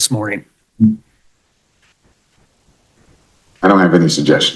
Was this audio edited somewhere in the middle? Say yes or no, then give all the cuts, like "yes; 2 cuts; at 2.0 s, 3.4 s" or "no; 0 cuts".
yes; 1 cut; at 2.5 s